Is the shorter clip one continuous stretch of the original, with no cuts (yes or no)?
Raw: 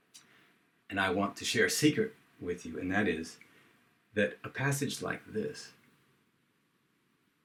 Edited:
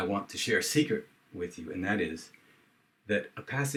yes